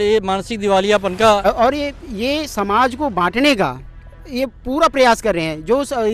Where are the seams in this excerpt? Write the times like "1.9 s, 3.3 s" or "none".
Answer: 1.4 s